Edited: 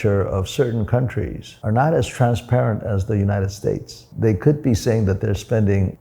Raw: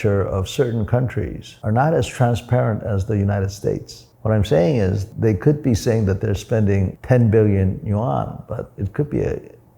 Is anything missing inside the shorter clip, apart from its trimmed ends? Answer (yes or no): yes